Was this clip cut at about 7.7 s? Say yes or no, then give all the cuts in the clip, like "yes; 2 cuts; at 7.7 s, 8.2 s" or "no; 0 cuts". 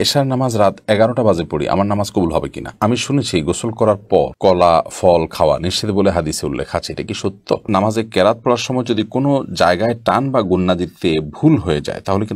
yes; 2 cuts; at 2.7 s, 7.7 s